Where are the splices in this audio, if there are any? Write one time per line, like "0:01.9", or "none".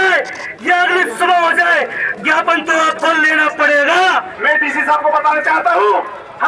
0:04.3